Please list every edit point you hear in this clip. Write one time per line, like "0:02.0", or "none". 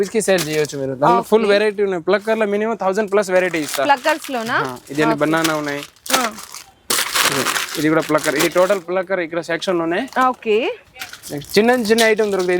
none